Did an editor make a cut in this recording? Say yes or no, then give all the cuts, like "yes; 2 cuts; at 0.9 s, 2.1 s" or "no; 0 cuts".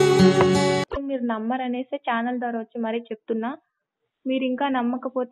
yes; 1 cut; at 0.9 s